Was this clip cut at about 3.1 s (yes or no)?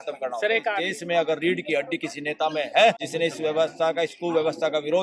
yes